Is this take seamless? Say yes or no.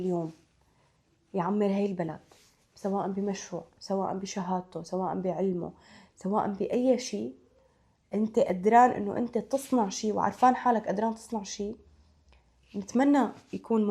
yes